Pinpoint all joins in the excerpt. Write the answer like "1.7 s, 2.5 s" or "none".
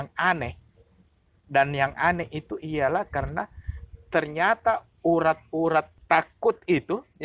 6.0 s

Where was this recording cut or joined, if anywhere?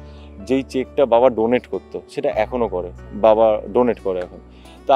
none

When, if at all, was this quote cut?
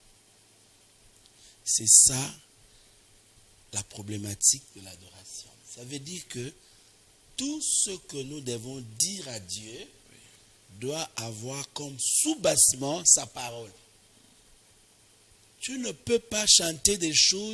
none

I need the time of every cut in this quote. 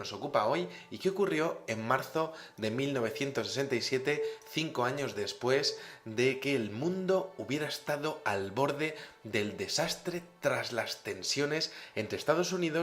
10.6 s

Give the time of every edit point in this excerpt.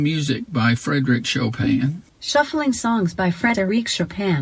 2.1 s

